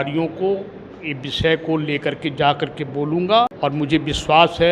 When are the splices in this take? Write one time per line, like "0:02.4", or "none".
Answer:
0:03.5